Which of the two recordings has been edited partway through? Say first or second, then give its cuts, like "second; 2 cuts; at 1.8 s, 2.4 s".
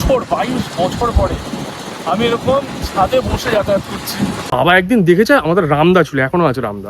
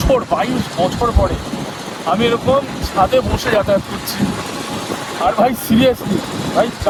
first; 1 cut; at 4.4 s